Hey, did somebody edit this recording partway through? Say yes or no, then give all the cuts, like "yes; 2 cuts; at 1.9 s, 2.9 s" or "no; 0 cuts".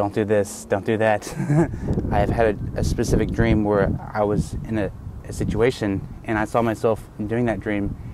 yes; 1 cut; at 1.8 s